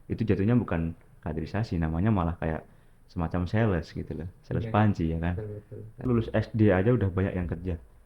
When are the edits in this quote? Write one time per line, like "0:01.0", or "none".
0:06.1